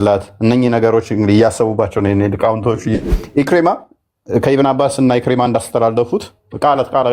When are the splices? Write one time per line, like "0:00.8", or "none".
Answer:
0:03.1